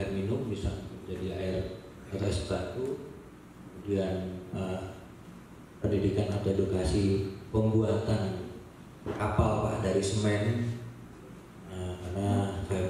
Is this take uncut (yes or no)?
yes